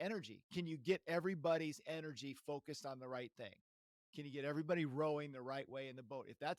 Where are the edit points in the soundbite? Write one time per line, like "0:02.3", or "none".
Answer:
none